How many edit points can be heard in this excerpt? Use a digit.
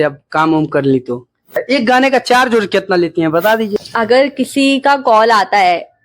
2